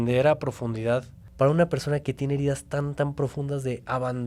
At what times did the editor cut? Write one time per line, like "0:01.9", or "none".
0:01.2